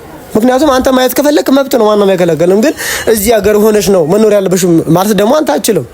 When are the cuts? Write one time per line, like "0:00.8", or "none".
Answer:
none